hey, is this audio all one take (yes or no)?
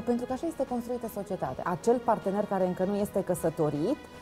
no